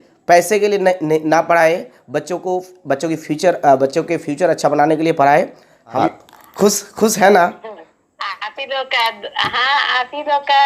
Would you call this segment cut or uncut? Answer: cut